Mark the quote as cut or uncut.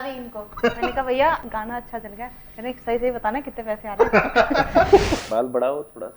cut